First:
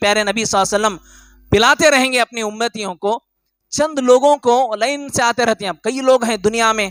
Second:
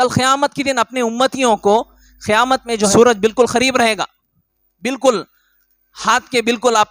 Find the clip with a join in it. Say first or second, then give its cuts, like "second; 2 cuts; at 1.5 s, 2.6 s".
second; 1 cut; at 2.9 s